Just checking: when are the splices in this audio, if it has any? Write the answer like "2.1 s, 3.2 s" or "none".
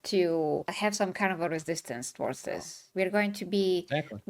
2.8 s